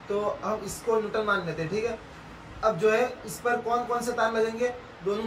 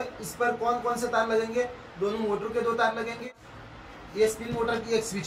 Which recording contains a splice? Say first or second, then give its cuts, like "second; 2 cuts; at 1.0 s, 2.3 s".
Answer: second; 1 cut; at 3.2 s